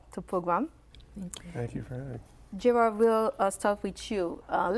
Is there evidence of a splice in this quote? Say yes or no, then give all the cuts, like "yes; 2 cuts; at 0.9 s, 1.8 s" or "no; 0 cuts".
no; 0 cuts